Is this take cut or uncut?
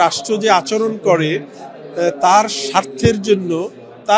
uncut